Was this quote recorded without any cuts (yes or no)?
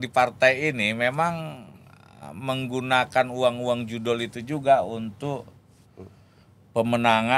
yes